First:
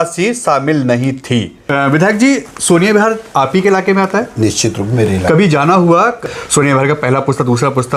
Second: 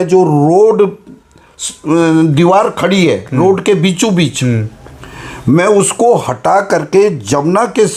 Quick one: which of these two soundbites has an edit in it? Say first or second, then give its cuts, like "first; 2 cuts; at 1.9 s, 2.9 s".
first; 2 cuts; at 1.6 s, 6.2 s